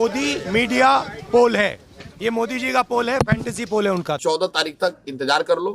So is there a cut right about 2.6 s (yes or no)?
no